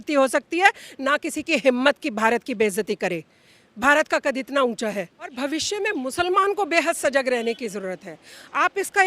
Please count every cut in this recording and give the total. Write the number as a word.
one